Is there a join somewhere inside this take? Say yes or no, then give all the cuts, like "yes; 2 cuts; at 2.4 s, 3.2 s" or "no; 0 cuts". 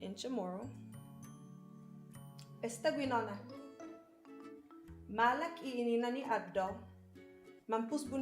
yes; 2 cuts; at 0.7 s, 2.2 s